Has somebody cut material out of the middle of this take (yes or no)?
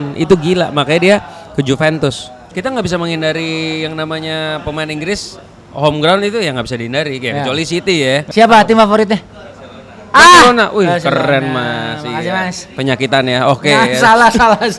yes